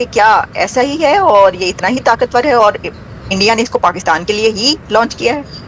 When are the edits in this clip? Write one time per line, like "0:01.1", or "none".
none